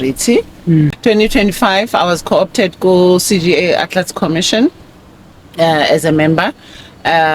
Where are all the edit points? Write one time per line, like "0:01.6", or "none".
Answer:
0:00.9